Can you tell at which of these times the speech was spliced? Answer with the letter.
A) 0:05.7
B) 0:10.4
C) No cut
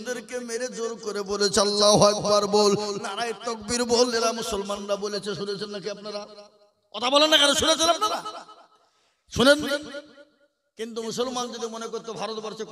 C